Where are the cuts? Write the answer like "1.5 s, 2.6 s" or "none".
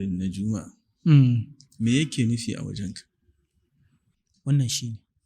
4.0 s